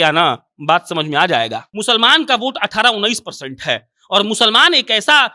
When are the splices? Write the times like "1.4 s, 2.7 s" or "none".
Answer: 1.7 s